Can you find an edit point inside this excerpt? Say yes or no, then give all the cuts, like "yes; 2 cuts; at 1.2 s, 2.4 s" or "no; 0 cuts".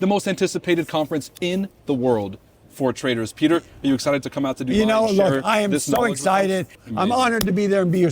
yes; 1 cut; at 6.8 s